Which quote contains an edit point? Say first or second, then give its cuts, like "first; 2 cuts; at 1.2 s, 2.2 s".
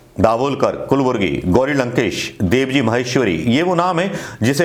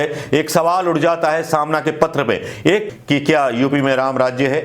second; 1 cut; at 2.8 s